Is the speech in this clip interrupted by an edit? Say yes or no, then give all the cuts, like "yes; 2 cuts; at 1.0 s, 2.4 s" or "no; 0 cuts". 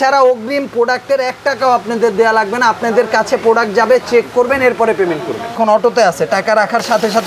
yes; 1 cut; at 5.5 s